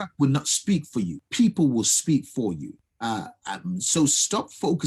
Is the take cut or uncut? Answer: cut